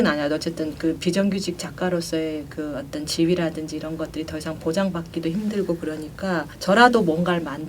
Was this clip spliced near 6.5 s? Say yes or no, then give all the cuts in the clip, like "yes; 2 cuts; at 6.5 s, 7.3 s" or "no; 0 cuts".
yes; 1 cut; at 6.5 s